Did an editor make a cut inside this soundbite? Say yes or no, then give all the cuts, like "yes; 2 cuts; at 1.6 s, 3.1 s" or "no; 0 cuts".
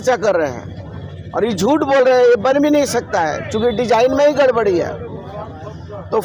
no; 0 cuts